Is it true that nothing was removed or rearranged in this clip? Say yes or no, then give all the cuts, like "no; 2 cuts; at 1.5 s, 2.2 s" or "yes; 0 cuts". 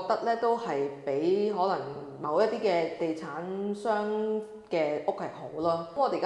yes; 0 cuts